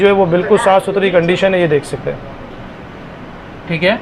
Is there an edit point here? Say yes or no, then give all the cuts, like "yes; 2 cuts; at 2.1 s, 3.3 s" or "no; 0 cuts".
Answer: no; 0 cuts